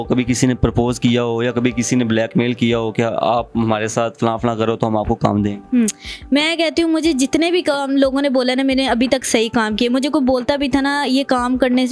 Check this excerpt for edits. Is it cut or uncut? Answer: uncut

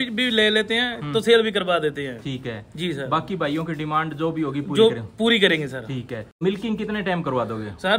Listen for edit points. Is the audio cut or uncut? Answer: cut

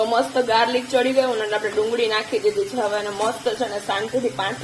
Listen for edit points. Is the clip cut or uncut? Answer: uncut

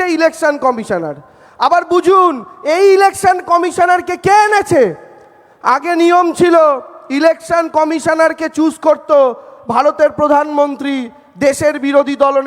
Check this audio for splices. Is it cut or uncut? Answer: uncut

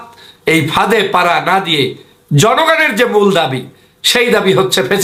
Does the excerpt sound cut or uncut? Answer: uncut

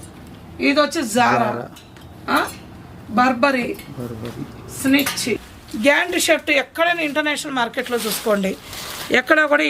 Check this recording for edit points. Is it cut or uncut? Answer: cut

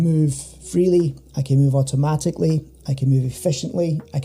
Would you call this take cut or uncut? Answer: uncut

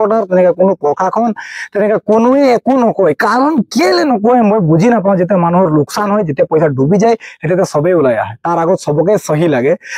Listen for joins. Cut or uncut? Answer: uncut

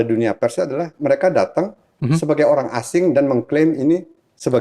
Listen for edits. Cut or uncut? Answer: uncut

